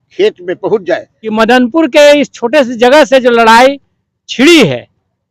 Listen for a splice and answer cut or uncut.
cut